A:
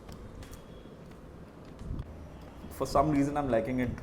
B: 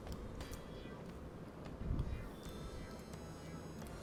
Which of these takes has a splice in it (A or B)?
A